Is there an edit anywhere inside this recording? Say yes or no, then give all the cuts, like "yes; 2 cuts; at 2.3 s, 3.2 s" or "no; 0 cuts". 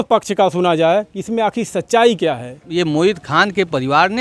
yes; 1 cut; at 2.6 s